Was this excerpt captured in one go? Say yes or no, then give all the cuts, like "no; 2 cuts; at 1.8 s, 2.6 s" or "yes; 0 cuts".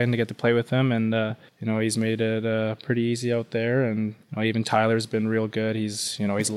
no; 2 cuts; at 1.5 s, 4.2 s